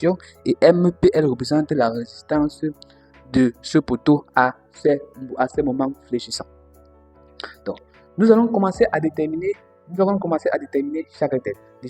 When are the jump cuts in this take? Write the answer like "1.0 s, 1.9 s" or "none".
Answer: 3.9 s